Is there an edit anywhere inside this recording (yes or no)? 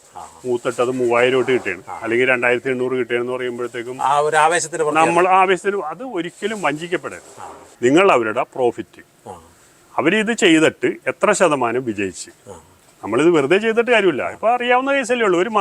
yes